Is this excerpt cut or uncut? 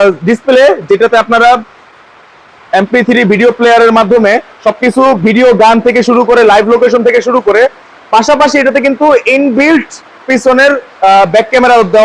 uncut